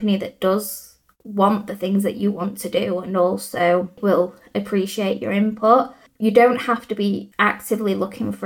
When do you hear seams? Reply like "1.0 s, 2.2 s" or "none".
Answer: 4.0 s, 6.0 s, 7.3 s